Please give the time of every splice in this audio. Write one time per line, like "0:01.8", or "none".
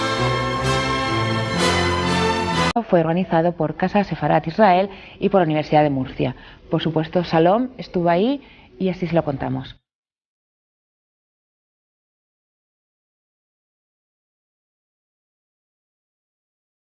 none

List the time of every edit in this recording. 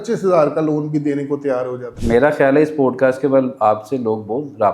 0:01.9

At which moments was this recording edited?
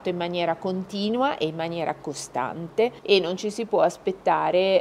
0:03.0

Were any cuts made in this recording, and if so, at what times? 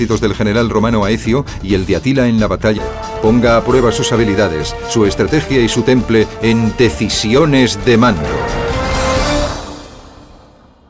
none

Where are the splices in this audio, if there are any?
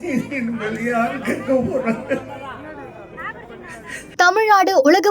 0:04.1

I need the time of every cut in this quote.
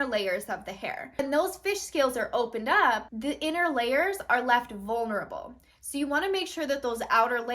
0:01.1
0:03.1

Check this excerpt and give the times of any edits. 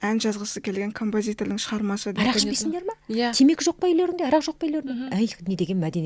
0:02.2

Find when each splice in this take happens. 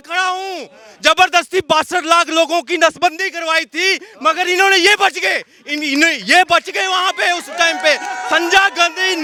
none

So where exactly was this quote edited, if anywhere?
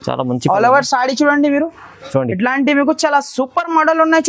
none

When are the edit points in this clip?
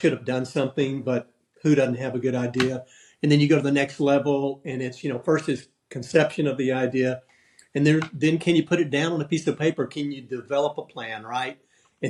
none

